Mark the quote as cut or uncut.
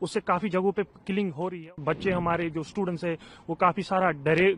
cut